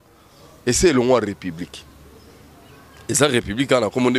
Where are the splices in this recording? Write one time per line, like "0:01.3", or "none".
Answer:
none